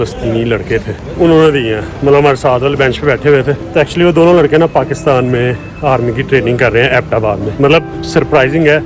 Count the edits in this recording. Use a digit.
3